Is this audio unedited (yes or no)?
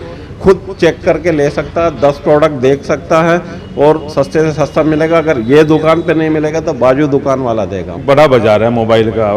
no